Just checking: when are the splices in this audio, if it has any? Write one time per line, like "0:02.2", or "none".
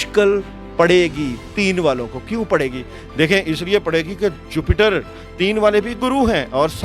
none